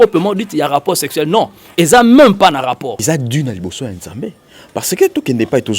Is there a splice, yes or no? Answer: yes